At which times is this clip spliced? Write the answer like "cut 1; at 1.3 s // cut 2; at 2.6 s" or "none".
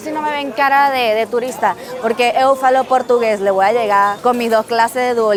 none